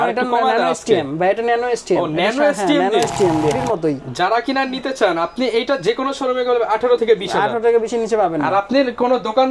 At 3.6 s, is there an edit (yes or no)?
yes